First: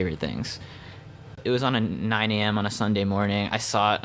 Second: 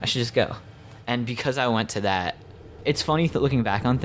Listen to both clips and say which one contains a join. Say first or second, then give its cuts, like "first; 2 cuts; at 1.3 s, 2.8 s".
first; 1 cut; at 1.3 s